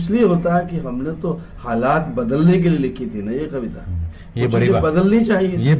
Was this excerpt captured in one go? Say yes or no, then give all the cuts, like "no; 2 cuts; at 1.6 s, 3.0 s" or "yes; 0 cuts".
yes; 0 cuts